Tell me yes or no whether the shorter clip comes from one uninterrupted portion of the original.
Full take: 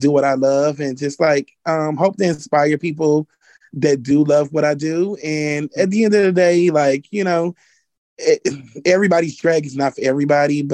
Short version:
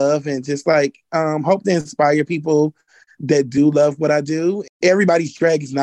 no